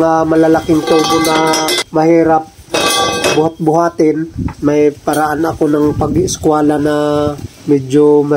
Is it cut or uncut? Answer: cut